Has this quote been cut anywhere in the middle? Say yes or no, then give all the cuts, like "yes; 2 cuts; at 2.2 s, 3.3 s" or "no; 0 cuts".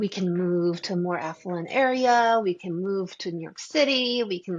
no; 0 cuts